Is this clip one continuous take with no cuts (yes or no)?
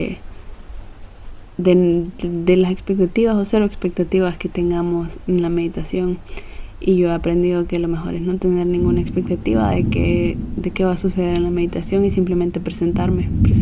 yes